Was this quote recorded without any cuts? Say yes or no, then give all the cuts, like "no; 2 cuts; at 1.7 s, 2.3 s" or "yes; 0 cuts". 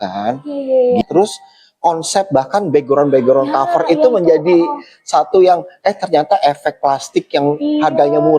no; 1 cut; at 1.0 s